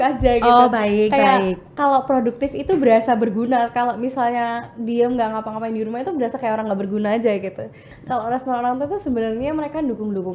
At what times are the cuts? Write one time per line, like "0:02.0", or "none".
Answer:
0:07.8